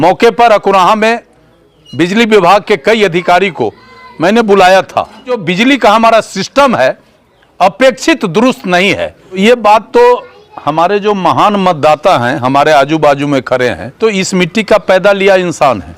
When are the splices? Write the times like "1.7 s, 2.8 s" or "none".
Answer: 5.4 s, 9.4 s, 13.9 s